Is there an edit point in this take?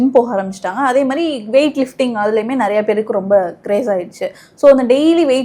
no; 0 cuts

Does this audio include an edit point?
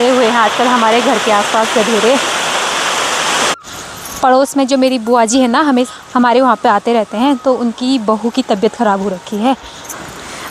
no; 0 cuts

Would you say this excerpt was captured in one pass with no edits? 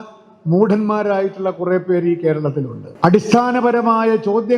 no; 1 cut; at 2.9 s

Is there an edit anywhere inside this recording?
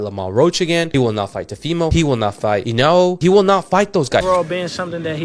yes; 1 cut; at 4.2 s

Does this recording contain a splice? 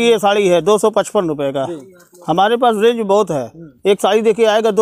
no; 0 cuts

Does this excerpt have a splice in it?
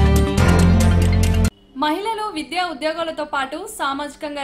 no; 0 cuts

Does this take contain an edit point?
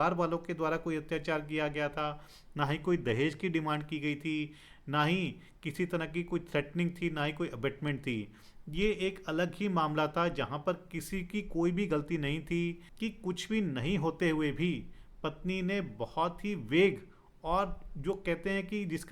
yes; 1 cut; at 12.8 s

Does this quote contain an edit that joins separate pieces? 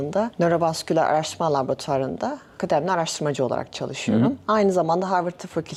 no; 0 cuts

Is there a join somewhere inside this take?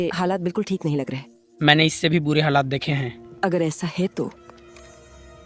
no; 0 cuts

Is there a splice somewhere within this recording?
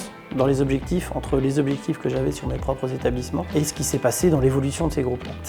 no; 0 cuts

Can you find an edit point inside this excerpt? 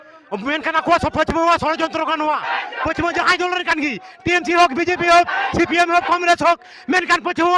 no; 0 cuts

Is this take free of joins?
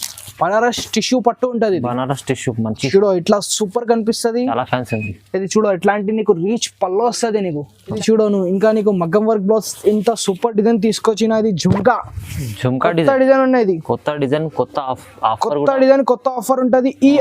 no; 1 cut; at 7.9 s

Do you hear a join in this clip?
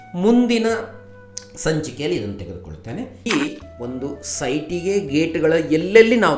yes; 1 cut; at 3.2 s

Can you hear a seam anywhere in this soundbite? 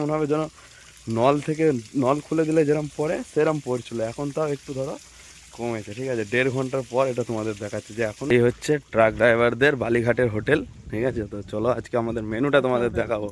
yes; 1 cut; at 8.3 s

